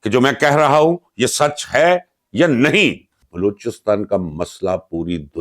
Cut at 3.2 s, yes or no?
yes